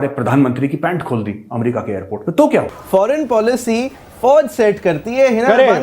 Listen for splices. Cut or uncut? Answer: cut